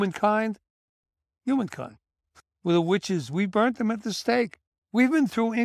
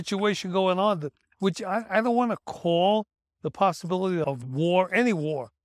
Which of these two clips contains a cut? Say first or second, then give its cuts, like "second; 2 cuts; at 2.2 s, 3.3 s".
first; 1 cut; at 2.4 s